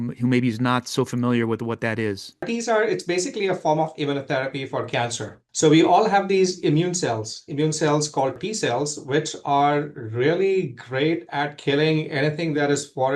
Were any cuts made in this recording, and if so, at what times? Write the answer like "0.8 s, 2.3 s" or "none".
2.5 s, 5.4 s, 8.4 s